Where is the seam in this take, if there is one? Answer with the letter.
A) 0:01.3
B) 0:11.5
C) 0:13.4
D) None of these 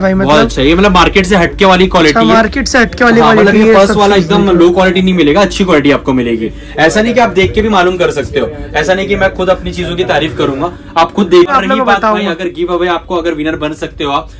B